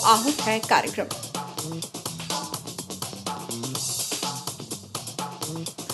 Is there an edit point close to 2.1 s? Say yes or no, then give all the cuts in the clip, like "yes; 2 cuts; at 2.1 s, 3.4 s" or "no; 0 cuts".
no; 0 cuts